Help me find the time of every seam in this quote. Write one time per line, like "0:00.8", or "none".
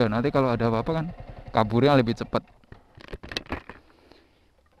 none